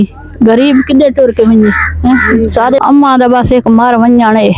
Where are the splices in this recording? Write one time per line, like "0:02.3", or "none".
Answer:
0:02.8